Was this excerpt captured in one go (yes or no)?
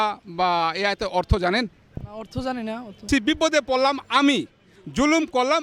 no